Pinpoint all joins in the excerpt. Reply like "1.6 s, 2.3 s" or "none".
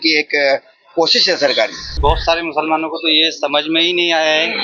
1.9 s